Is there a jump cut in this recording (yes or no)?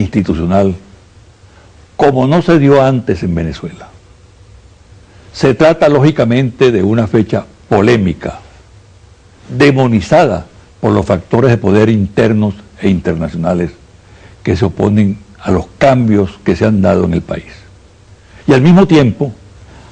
yes